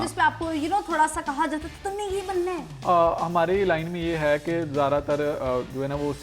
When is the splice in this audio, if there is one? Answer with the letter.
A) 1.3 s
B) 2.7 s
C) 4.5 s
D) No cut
D